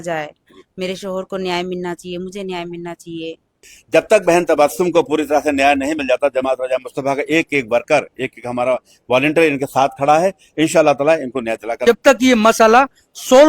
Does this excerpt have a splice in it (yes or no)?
yes